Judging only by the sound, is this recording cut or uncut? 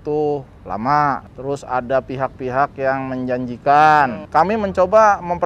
cut